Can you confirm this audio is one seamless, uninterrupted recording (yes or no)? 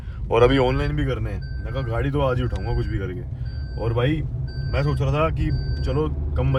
yes